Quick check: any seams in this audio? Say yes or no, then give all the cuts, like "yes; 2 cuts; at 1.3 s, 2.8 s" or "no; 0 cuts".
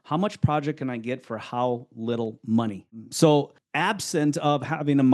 yes; 2 cuts; at 2.9 s, 3.6 s